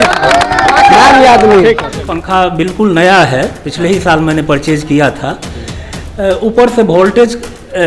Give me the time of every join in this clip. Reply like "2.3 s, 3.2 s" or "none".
2.1 s